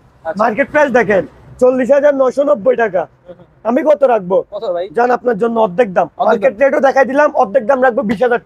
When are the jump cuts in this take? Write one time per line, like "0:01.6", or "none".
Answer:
none